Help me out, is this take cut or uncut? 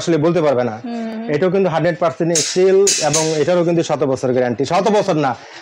uncut